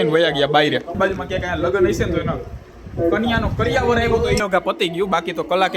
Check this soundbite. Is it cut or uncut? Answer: cut